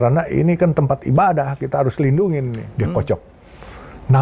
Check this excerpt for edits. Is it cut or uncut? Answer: cut